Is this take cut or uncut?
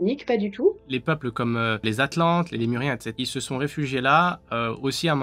cut